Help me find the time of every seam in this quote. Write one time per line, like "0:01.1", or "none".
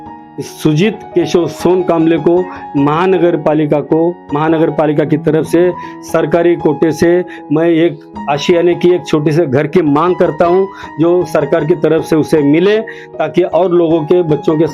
none